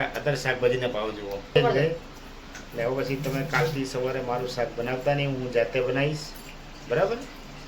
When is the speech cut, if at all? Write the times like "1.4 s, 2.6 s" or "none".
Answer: 1.6 s